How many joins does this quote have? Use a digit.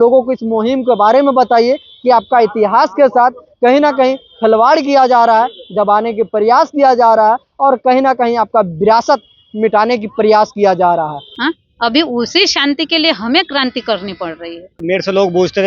2